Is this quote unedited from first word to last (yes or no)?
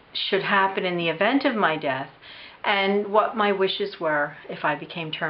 yes